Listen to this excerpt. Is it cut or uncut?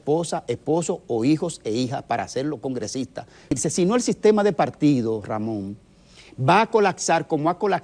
cut